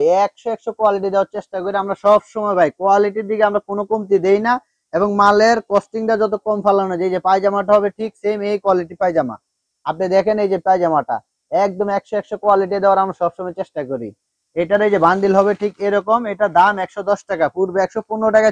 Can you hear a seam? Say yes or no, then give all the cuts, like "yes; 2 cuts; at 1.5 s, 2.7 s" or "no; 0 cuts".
no; 0 cuts